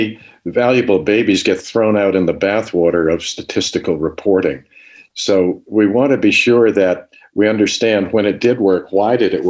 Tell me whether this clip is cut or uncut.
uncut